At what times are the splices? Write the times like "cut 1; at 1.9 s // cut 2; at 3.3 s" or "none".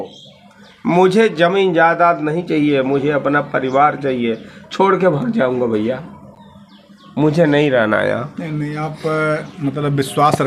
none